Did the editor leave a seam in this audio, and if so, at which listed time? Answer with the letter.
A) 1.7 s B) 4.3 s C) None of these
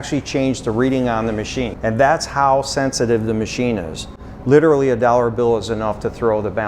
A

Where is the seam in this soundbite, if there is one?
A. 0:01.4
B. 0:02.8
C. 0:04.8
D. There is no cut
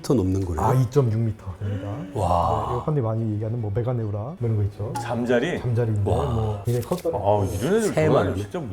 B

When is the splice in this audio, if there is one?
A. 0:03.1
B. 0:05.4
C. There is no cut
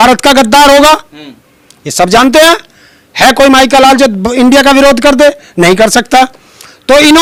C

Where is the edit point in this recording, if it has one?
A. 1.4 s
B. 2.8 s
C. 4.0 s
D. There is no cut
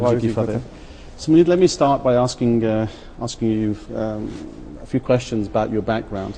D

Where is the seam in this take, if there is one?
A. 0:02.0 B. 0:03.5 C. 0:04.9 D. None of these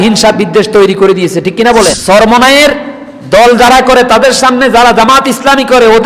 A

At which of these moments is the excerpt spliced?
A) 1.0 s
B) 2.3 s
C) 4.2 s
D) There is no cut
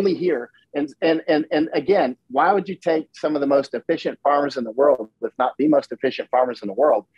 D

